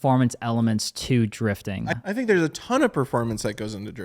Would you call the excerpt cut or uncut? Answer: cut